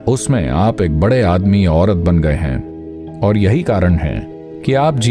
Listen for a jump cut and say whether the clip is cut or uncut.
uncut